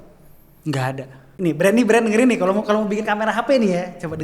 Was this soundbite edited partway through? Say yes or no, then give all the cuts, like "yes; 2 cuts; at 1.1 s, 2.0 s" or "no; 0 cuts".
yes; 1 cut; at 1.2 s